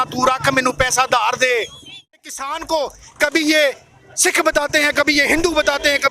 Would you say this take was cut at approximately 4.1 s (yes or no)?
no